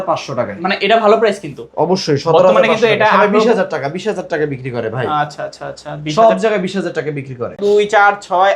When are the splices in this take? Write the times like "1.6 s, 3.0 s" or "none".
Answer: 7.6 s